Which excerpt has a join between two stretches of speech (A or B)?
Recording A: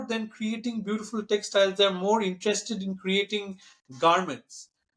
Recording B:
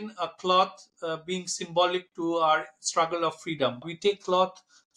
B